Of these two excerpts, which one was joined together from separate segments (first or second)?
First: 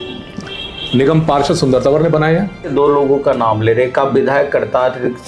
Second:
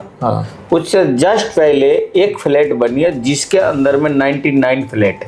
first